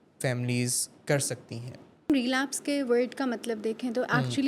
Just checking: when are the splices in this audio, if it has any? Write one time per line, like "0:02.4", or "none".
0:02.1